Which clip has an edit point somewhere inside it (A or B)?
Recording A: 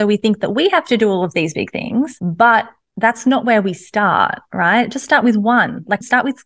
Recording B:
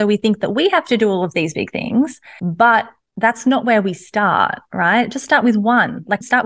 A